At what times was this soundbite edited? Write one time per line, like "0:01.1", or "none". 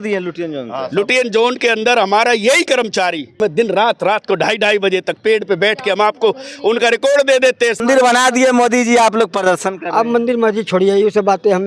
0:03.3
0:07.8